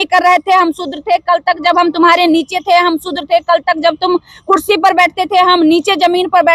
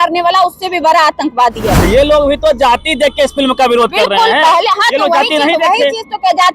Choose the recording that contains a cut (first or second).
second